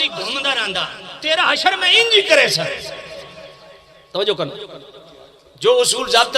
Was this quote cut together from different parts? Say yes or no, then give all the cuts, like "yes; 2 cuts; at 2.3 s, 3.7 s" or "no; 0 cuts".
no; 0 cuts